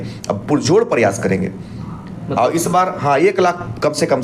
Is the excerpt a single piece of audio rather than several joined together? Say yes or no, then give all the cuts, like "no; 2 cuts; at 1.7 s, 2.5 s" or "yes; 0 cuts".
yes; 0 cuts